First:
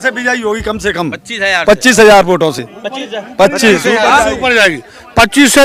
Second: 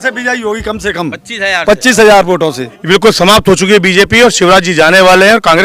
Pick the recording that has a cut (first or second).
second